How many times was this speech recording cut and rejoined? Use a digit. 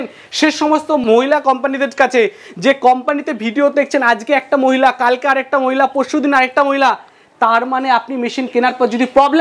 1